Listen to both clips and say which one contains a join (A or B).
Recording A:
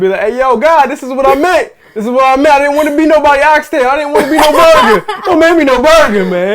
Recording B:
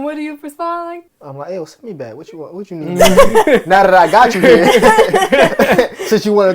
B